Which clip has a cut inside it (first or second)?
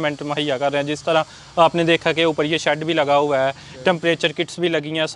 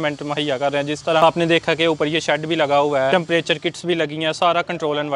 second